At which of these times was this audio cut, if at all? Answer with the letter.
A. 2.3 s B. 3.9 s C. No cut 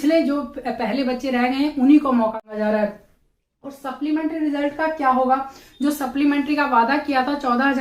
A